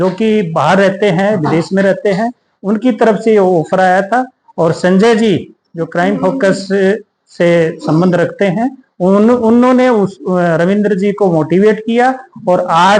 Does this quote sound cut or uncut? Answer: uncut